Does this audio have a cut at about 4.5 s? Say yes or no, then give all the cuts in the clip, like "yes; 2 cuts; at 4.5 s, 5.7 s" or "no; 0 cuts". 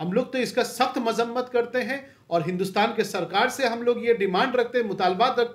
no; 0 cuts